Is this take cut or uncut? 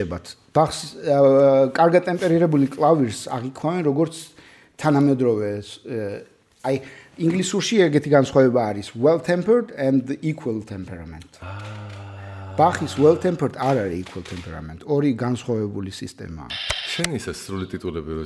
cut